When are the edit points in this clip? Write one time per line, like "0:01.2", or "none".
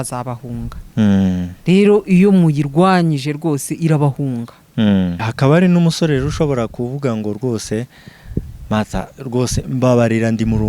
0:05.2

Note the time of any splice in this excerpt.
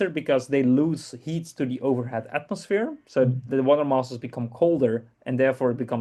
none

